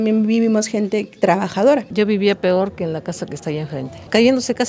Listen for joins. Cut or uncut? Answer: cut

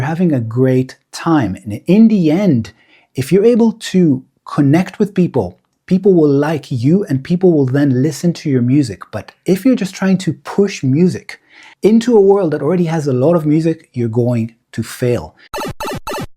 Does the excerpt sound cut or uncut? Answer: cut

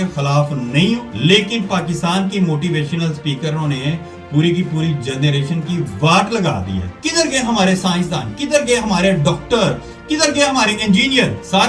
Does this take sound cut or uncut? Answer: uncut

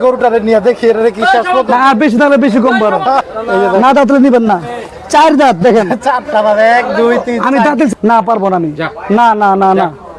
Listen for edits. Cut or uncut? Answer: cut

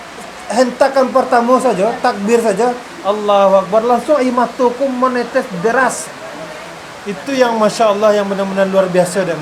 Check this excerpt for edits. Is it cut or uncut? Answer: uncut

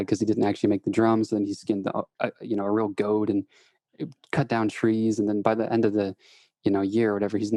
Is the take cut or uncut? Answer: uncut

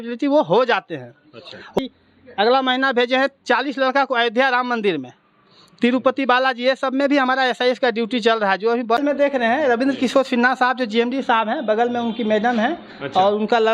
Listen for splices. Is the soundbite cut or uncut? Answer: cut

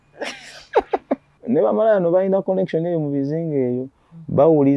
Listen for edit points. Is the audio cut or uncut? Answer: cut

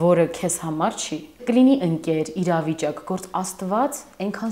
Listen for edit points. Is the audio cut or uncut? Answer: cut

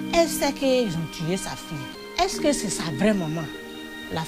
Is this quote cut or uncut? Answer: cut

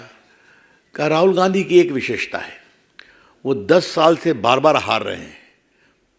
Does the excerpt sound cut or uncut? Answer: uncut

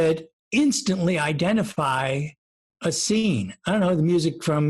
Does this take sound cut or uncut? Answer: uncut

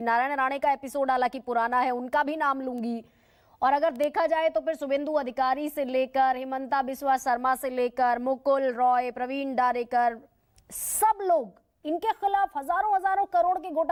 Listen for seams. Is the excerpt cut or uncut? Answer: uncut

